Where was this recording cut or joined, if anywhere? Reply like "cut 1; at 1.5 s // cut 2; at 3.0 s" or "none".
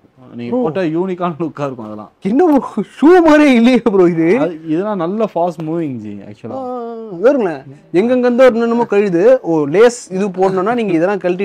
none